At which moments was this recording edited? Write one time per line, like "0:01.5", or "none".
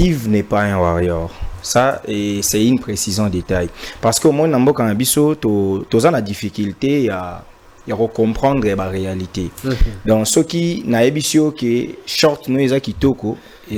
none